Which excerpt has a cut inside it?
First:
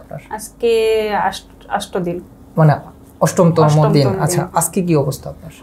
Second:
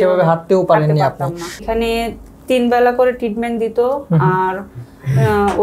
second; 1 cut; at 1.6 s

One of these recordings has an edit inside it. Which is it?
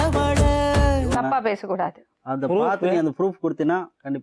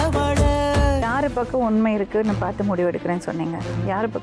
second; 1 cut; at 1.0 s

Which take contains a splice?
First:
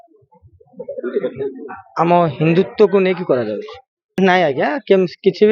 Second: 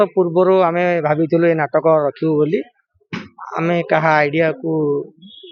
first; 1 cut; at 4.1 s

